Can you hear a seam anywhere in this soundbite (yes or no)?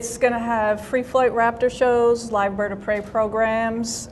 no